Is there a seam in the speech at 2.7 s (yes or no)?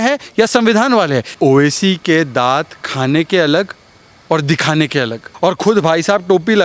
no